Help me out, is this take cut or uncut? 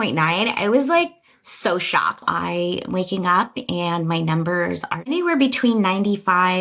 cut